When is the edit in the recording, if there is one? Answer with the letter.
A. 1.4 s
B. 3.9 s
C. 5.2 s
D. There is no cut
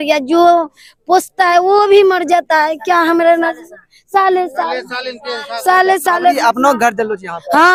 D